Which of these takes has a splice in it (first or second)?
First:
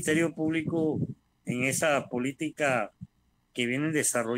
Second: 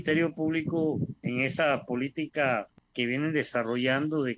second